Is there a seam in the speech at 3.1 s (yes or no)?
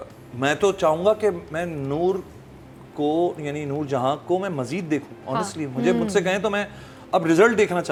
no